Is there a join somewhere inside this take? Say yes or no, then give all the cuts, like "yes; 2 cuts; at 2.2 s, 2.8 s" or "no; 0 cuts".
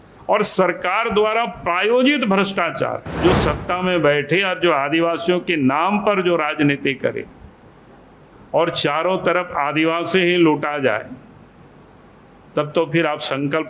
yes; 1 cut; at 3.0 s